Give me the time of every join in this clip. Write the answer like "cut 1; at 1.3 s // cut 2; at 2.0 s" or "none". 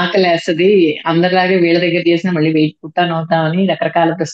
none

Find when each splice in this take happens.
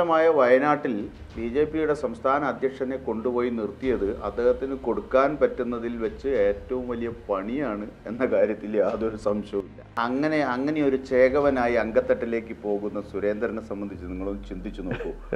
cut 1; at 9.9 s

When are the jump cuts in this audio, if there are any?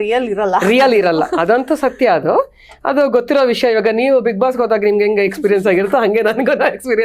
none

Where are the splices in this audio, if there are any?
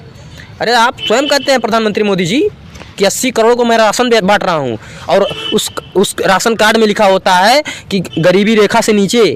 none

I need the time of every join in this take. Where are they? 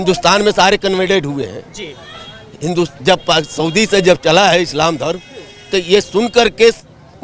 none

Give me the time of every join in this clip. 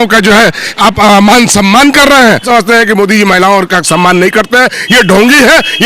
cut 1; at 2.5 s

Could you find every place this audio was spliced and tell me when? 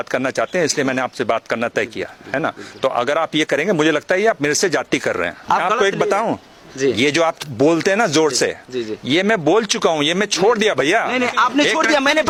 none

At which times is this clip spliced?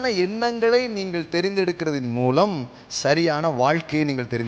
none

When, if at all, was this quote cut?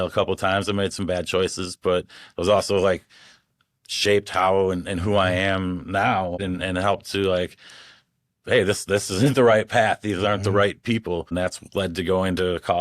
cut 1; at 6.4 s // cut 2; at 11.3 s

